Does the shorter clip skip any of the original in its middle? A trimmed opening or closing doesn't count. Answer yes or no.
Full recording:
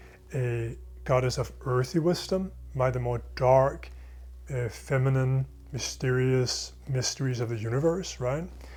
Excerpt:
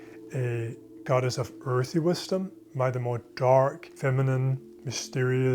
yes